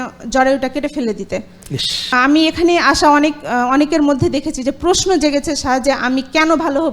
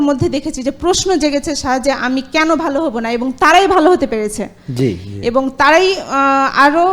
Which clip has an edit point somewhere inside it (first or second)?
first